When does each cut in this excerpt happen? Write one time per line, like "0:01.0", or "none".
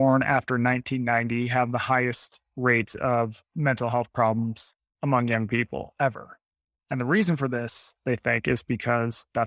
none